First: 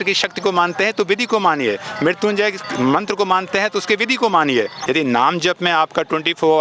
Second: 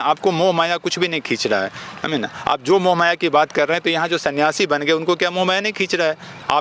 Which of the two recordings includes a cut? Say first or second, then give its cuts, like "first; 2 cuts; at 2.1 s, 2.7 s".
first; 1 cut; at 4.8 s